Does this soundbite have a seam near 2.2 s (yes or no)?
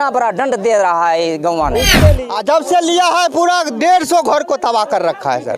yes